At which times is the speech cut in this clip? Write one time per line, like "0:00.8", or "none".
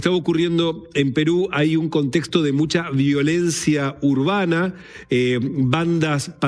none